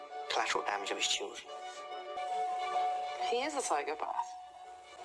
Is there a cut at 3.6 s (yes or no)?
no